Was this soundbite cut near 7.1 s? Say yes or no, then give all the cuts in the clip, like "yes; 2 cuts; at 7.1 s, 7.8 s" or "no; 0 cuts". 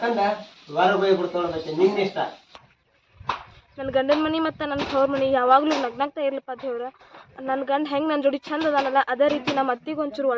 no; 1 cut; at 2.7 s